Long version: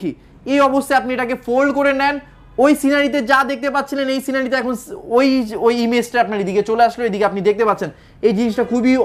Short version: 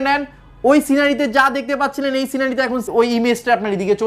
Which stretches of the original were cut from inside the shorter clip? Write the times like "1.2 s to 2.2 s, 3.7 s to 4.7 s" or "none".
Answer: 4.8 s to 5.5 s